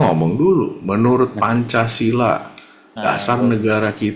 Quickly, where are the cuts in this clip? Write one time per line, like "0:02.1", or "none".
none